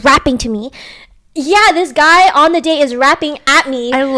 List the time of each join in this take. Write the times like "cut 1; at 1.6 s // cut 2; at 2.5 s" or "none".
none